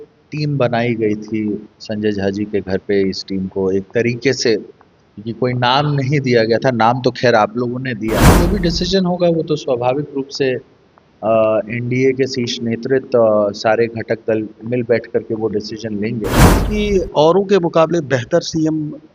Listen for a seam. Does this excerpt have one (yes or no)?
yes